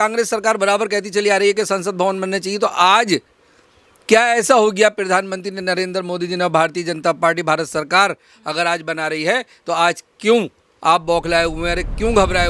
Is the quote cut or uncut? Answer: uncut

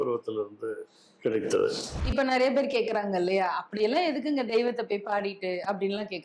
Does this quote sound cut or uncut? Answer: cut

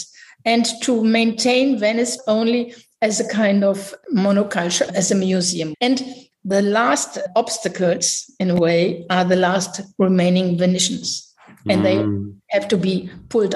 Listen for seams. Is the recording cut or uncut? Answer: cut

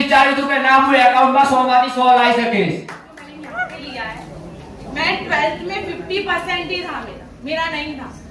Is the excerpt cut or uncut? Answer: cut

